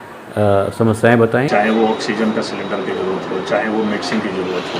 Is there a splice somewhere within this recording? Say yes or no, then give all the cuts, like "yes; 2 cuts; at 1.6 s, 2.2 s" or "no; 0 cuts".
yes; 1 cut; at 1.5 s